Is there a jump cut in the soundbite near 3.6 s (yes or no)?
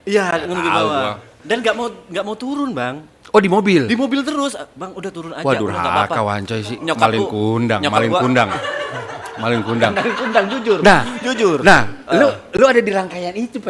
no